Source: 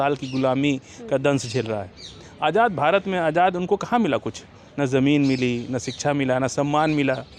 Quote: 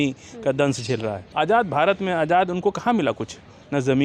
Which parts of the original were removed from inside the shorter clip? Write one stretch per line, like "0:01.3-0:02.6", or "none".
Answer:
0:01.9-0:02.3

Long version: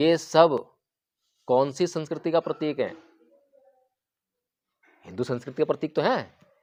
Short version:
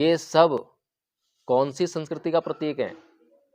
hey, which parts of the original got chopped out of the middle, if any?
none

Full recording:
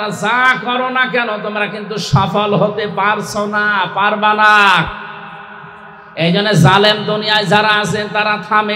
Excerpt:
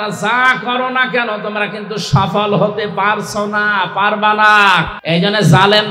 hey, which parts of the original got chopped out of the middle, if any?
0:04.9-0:06.1

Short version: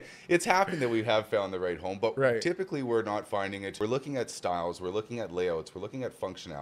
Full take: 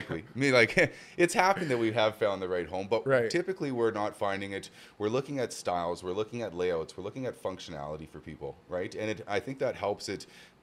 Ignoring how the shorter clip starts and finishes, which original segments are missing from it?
0:04.6-0:04.9

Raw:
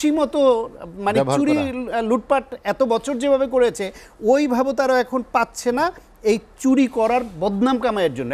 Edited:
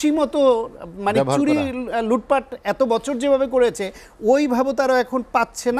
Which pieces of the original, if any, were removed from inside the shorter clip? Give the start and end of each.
none

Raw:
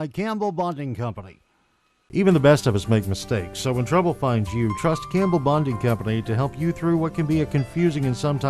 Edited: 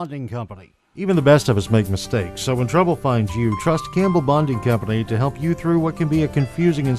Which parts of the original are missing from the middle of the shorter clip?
0:01.7-0:02.2

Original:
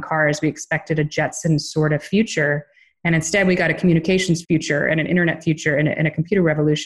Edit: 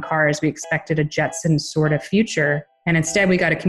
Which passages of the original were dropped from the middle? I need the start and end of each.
0:02.7-0:02.9

